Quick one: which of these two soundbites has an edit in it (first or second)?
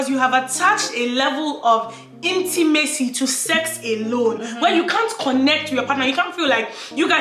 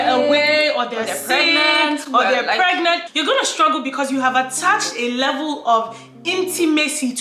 second